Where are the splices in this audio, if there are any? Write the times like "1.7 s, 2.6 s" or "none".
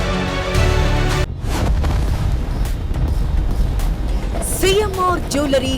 1.3 s